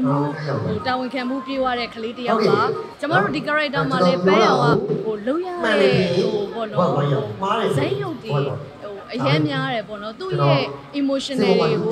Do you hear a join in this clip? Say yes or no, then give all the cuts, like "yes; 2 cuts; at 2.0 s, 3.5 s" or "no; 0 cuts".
yes; 1 cut; at 2.9 s